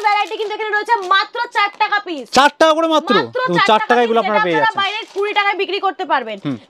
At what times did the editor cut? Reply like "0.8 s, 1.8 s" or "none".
none